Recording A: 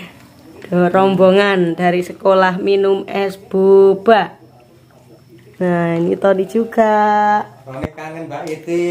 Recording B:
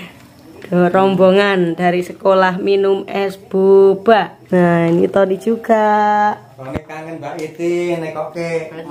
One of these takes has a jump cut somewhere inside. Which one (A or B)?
B